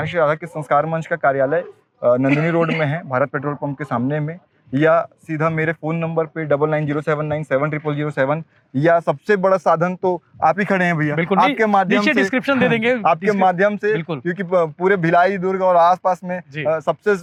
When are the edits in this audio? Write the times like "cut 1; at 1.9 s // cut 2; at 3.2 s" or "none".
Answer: none